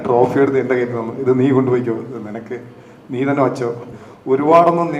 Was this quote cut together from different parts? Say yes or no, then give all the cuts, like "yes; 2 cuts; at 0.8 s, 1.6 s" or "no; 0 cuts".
yes; 1 cut; at 3.8 s